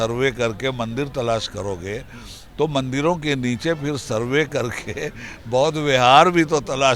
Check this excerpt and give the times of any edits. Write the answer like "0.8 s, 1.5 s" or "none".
none